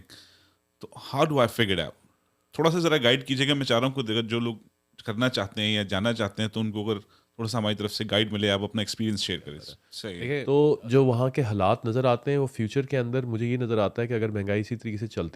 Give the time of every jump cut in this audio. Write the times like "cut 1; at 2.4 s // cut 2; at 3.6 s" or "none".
cut 1; at 10.1 s